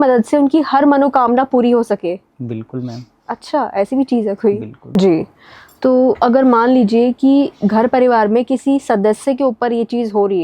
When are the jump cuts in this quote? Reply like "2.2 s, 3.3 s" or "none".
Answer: 4.7 s